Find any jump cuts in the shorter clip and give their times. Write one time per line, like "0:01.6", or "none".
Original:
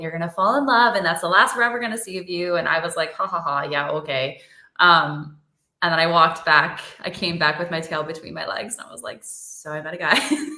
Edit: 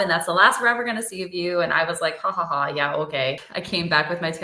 0:03.5